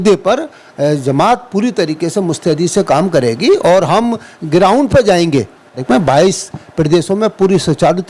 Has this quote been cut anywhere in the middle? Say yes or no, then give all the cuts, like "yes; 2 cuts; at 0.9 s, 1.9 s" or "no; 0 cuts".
yes; 1 cut; at 5.8 s